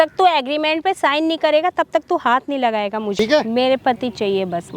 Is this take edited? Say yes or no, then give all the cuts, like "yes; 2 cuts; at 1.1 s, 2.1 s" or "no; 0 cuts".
yes; 1 cut; at 3.2 s